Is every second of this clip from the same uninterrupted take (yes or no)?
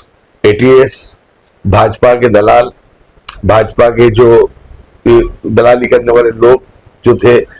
yes